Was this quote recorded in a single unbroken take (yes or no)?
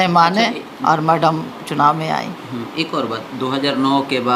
yes